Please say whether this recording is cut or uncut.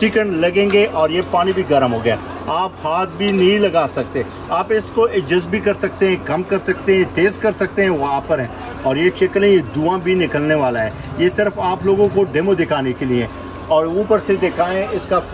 uncut